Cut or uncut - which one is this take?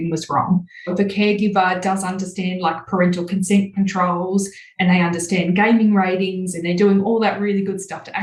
uncut